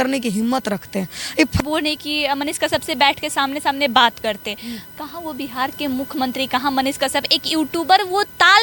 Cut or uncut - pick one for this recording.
uncut